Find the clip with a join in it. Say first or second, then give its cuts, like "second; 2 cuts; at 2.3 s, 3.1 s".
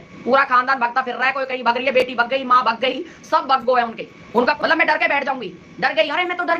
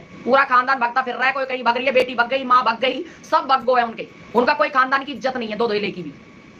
first; 1 cut; at 4.6 s